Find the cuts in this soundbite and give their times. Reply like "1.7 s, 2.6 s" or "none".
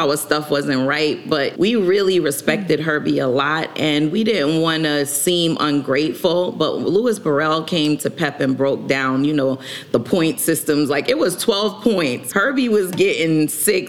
1.5 s, 12.2 s